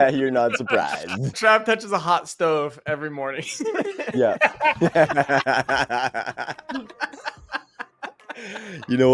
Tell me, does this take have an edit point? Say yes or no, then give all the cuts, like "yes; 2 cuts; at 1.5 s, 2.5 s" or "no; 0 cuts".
yes; 1 cut; at 1.2 s